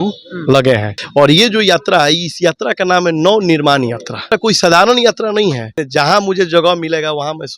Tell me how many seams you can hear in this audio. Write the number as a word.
three